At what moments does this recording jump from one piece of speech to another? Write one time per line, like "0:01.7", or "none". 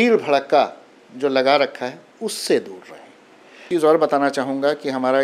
0:03.6

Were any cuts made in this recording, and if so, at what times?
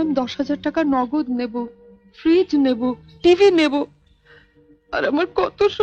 none

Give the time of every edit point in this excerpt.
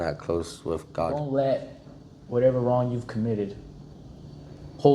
0:01.1

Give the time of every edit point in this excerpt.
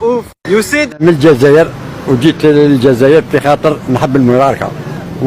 0:01.0

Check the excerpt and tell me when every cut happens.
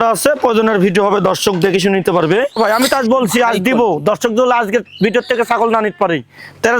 0:02.6

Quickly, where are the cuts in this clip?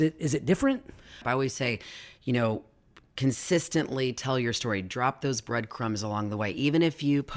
0:01.2

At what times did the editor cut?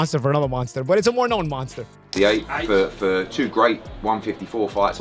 0:02.1

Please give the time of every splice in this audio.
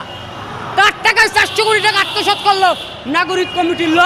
none

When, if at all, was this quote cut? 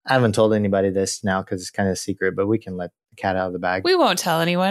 0:03.8

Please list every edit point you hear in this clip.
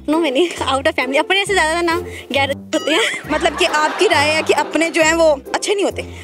0:03.2

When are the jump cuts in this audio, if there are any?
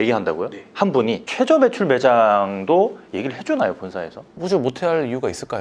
0:01.2

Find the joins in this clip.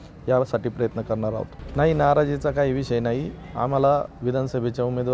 0:01.6
0:04.1

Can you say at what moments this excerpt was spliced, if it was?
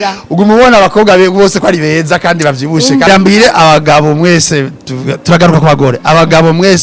0:03.1

